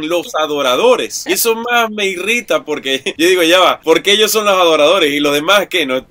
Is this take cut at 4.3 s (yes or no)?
no